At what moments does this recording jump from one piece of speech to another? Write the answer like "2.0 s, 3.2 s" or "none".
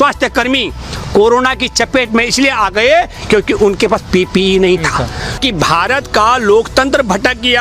5.3 s